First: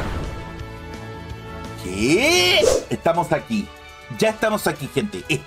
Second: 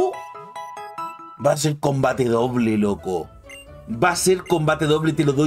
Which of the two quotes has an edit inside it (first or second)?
first